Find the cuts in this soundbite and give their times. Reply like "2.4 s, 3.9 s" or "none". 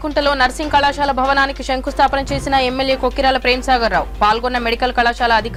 none